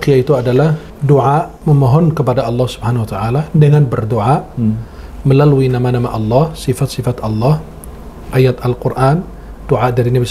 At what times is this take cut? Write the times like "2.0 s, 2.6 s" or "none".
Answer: 0.9 s, 1.5 s